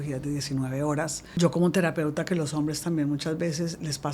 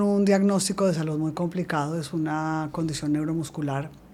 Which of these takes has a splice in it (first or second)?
first